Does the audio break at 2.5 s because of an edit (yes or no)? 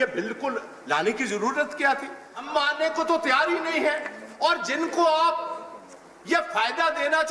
yes